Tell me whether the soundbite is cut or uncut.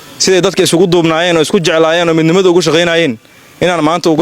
uncut